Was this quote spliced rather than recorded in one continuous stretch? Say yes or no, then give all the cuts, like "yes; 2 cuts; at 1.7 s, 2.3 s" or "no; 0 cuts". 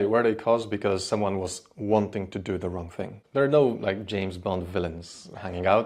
yes; 1 cut; at 3.1 s